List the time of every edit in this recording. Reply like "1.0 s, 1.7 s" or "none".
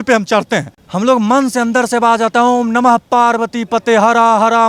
none